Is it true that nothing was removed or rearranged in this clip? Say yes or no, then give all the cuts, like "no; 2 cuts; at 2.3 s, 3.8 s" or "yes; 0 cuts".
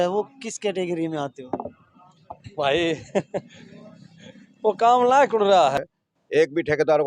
no; 1 cut; at 5.8 s